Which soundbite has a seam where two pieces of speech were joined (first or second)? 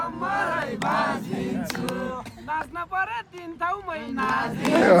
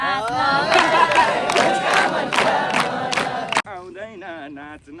second